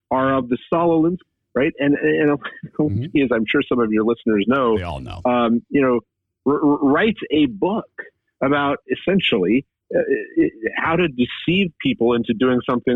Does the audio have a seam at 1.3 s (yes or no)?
yes